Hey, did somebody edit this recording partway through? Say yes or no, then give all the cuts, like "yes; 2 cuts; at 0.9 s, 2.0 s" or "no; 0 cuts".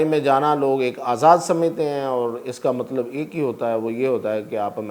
no; 0 cuts